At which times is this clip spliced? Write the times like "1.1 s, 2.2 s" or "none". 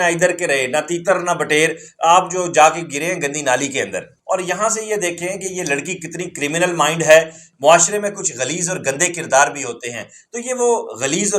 4.1 s, 7.4 s

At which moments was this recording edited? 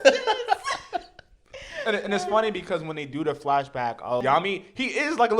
4.2 s

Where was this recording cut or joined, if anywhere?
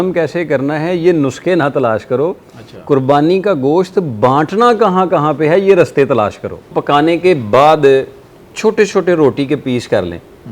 6.8 s

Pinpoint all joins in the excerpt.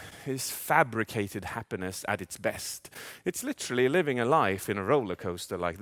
none

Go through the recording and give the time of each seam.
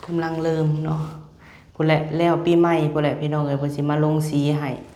none

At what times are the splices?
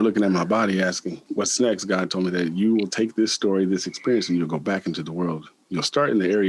1.1 s

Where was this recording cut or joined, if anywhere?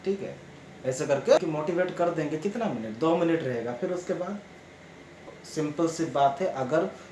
1.4 s, 5.2 s

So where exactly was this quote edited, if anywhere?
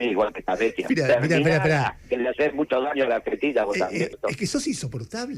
4.2 s

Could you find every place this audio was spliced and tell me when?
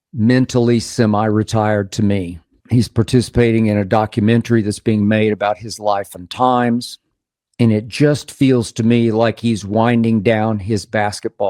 2.5 s

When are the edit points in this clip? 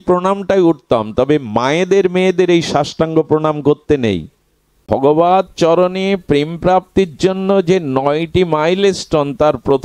4.8 s

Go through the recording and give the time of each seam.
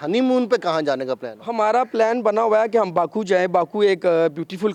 none

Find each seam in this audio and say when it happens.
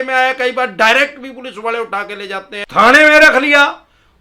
2.7 s

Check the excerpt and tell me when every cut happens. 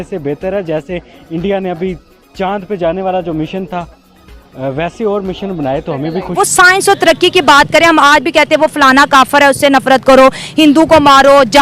6.3 s

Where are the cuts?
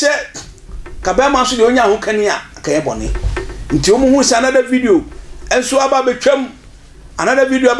none

